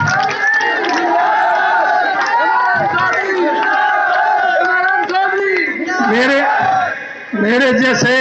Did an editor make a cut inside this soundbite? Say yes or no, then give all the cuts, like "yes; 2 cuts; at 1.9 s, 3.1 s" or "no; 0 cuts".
no; 0 cuts